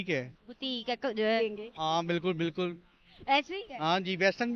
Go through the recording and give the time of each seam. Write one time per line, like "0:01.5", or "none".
0:01.4